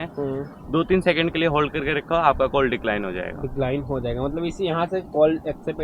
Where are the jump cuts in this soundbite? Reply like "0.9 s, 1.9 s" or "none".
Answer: none

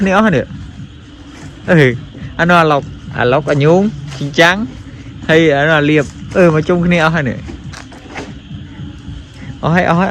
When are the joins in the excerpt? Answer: none

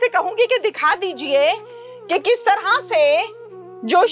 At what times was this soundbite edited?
none

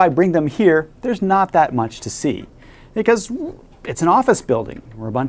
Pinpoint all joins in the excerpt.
3.3 s

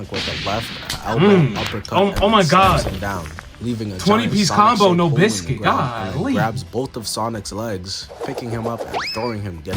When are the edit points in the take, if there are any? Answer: none

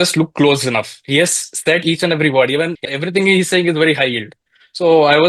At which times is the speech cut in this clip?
2.8 s

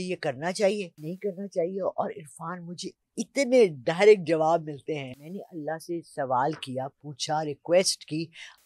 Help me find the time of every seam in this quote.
1.0 s, 5.1 s

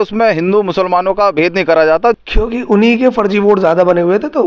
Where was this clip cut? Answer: 2.1 s

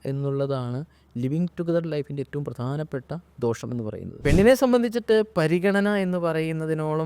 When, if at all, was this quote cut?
4.1 s

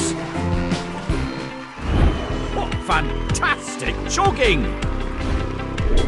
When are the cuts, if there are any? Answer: none

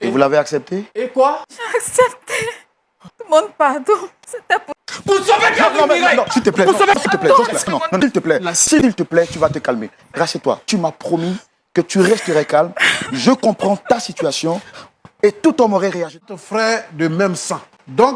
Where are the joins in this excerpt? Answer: 16.2 s

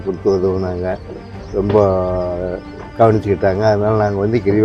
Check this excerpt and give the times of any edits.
none

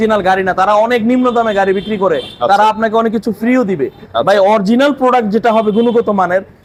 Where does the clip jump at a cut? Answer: none

